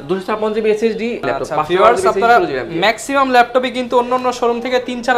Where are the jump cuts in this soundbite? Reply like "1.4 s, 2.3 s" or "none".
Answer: 1.2 s